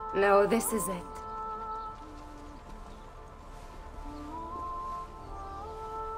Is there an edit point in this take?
yes; 1 cut; at 0.9 s

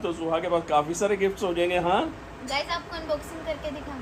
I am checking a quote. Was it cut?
no; 0 cuts

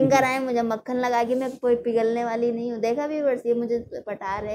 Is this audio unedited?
yes; 0 cuts

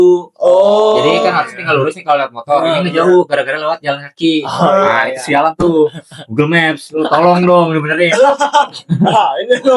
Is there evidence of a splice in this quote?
no; 0 cuts

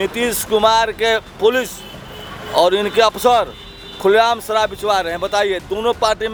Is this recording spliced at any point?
no; 0 cuts

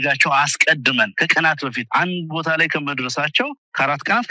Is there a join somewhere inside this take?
no; 0 cuts

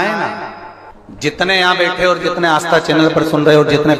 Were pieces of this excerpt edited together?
no; 0 cuts

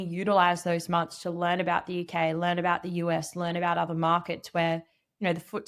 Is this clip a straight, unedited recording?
yes; 0 cuts

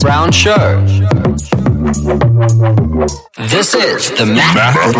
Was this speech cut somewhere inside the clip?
no; 0 cuts

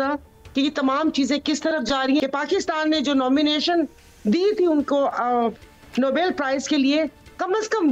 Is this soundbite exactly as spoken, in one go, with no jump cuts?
yes; 0 cuts

